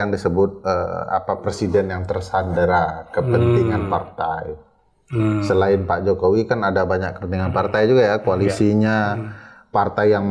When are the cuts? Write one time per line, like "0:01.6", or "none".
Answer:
none